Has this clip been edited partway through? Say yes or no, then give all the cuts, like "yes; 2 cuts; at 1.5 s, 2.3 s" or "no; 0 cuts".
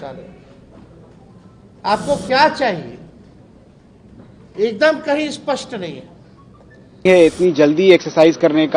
yes; 1 cut; at 7.0 s